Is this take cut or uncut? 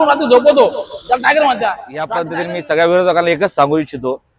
cut